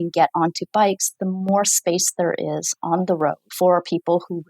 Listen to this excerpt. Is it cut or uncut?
cut